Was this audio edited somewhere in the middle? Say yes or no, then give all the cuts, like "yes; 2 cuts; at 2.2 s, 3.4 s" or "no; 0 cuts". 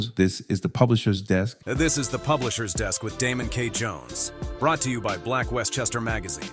yes; 1 cut; at 1.6 s